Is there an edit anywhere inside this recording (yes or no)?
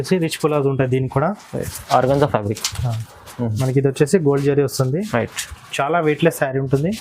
yes